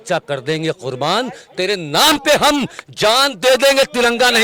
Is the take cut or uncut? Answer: uncut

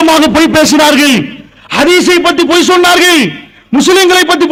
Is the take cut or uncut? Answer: uncut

